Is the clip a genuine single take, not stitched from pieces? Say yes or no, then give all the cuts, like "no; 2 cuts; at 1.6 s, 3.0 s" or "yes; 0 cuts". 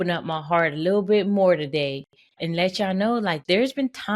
no; 2 cuts; at 2.3 s, 3.4 s